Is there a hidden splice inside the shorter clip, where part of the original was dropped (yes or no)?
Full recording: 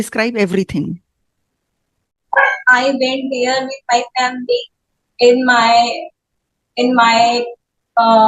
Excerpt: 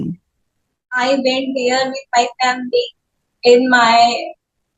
yes